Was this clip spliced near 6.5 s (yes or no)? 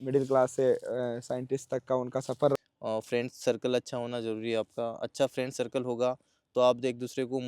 no